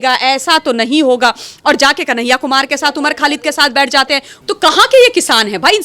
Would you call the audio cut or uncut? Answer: cut